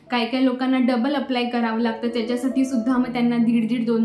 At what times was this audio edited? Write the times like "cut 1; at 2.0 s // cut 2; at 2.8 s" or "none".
none